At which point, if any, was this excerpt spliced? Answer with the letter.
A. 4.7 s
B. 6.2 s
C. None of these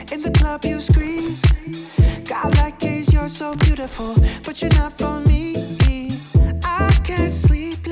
C